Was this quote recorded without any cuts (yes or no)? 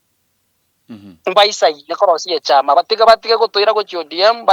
yes